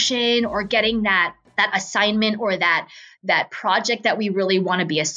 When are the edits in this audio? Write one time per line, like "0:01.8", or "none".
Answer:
0:01.4